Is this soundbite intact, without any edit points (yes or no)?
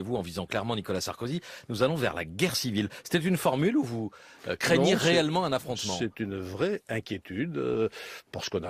yes